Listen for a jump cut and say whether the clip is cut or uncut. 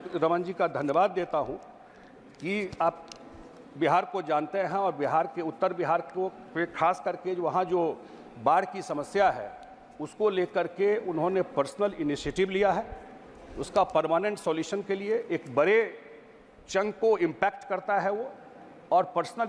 uncut